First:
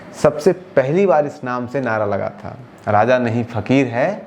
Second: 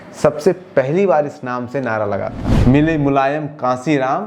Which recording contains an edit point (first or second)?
second